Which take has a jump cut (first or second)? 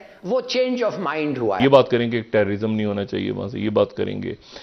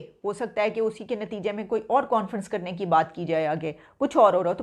first